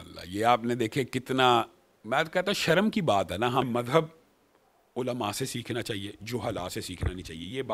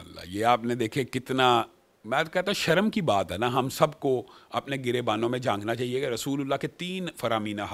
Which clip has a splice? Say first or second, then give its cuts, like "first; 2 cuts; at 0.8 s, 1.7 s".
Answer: first; 1 cut; at 3.6 s